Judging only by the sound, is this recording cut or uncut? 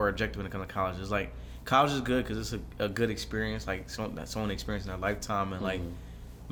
uncut